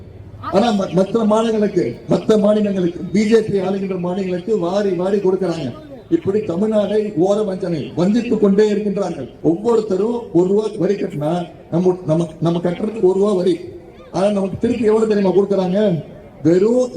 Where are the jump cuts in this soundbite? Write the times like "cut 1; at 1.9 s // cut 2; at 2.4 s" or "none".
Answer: cut 1; at 9.3 s